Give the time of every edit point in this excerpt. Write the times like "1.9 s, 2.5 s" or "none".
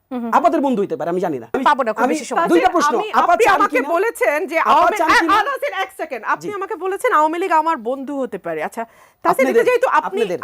1.5 s